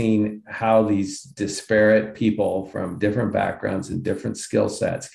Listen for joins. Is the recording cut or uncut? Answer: uncut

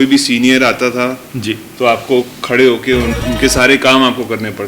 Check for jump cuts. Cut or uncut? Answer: cut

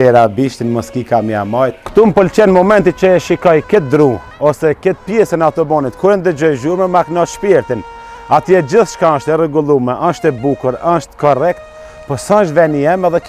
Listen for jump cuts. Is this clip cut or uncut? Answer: cut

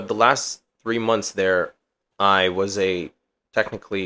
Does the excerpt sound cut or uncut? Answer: uncut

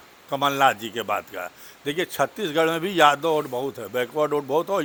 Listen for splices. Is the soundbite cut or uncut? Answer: uncut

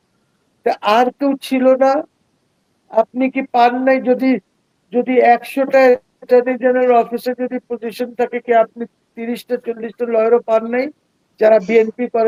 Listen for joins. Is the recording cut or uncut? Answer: uncut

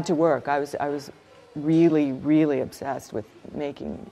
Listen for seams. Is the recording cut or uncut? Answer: uncut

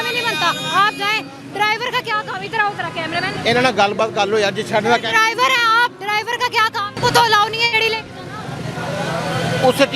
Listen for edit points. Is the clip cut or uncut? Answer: cut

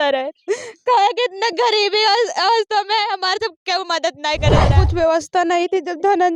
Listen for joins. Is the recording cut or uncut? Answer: cut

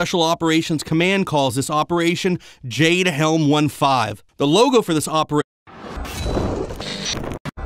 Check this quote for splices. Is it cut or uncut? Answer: uncut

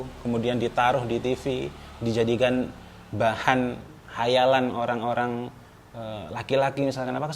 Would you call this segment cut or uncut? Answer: uncut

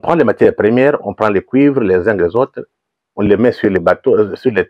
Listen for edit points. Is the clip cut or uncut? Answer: uncut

